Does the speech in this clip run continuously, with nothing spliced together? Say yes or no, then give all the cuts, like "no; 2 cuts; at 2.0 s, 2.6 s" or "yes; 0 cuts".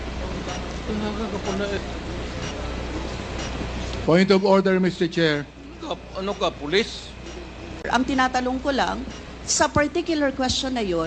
no; 1 cut; at 7.8 s